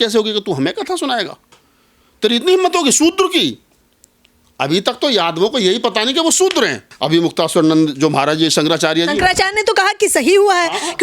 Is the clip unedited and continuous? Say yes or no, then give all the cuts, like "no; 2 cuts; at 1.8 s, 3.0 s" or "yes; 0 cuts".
no; 1 cut; at 6.9 s